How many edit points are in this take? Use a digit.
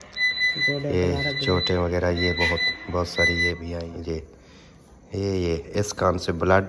1